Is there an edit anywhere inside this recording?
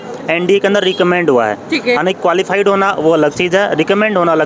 no; 0 cuts

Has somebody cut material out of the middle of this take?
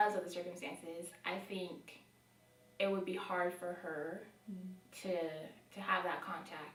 no; 0 cuts

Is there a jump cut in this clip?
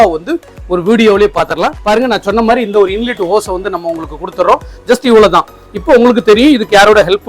yes; 1 cut; at 1.8 s

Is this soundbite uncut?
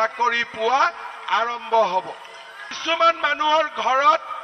no; 1 cut; at 2.7 s

